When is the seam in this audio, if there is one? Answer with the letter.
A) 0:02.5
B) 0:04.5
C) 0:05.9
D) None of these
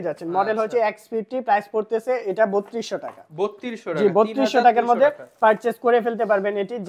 D